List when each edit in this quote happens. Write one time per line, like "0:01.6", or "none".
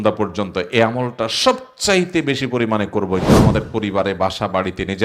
0:03.3